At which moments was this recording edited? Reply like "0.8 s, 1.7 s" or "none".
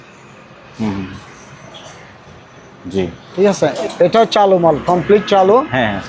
3.8 s